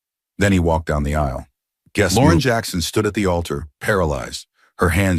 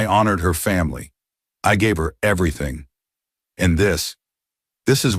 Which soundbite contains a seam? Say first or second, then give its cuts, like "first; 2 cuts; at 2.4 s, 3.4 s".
first; 1 cut; at 2.1 s